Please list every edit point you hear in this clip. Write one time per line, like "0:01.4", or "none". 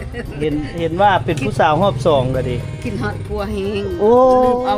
none